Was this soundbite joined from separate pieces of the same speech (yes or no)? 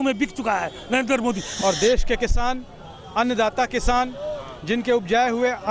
yes